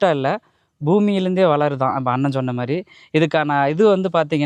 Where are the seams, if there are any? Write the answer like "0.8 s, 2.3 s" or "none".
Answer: none